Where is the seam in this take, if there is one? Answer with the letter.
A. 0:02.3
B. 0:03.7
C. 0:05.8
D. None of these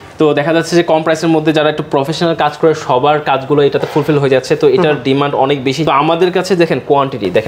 D